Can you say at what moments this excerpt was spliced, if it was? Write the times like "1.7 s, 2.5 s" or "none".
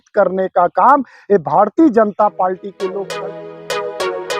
3.0 s